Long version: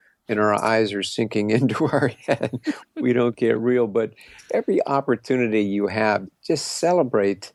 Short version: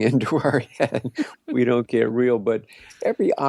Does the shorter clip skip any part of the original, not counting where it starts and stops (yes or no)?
no